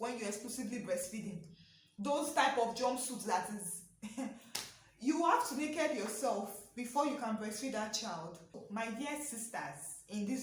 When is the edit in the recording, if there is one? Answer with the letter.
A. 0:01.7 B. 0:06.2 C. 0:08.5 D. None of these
C